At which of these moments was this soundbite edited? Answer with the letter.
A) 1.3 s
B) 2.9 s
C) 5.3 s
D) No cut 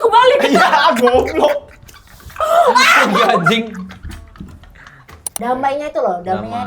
C